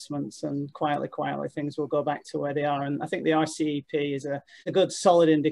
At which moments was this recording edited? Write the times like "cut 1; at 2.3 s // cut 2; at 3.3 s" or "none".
none